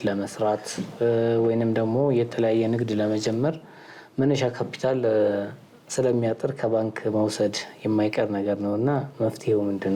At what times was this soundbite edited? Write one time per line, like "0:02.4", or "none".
none